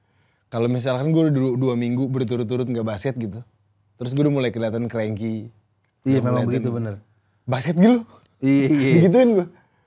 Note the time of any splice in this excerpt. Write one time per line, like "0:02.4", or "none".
none